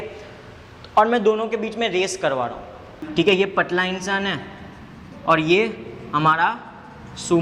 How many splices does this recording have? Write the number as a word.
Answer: one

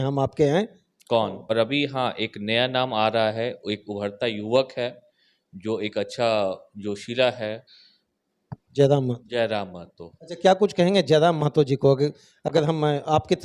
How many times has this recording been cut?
one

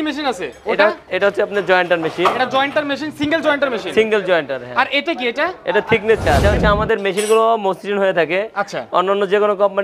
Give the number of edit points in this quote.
one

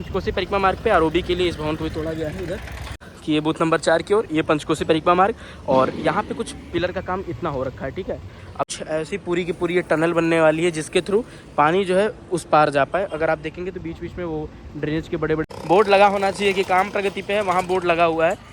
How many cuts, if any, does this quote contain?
three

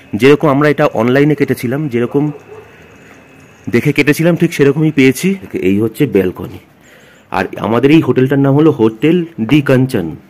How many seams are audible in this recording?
one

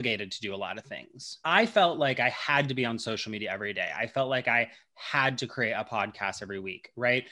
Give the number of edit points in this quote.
one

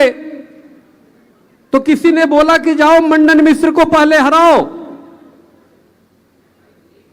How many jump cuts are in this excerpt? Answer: zero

